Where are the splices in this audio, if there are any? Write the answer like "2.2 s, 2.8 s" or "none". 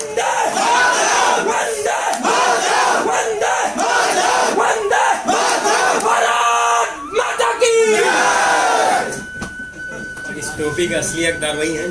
none